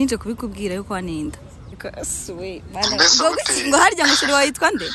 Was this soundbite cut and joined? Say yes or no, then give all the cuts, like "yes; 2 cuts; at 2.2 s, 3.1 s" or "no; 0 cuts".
yes; 1 cut; at 1.9 s